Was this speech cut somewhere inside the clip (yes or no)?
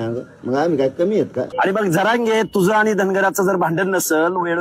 yes